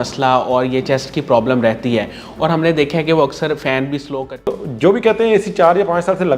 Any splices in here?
yes; 1 cut; at 4.2 s

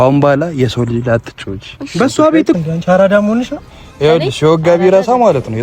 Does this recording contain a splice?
yes; 1 cut; at 2.6 s

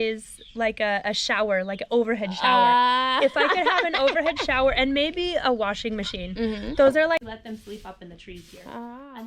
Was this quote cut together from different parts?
yes; 1 cut; at 7.2 s

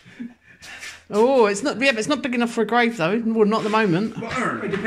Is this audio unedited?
yes; 0 cuts

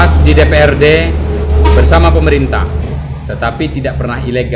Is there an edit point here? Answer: yes; 2 cuts; at 1.5 s, 3.0 s

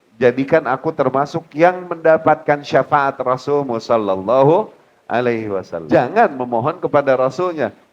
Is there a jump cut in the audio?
yes; 1 cut; at 5.7 s

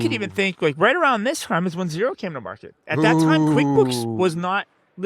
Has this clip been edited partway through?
no; 0 cuts

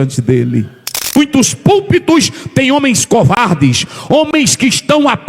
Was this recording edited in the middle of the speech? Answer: yes; 1 cut; at 1.2 s

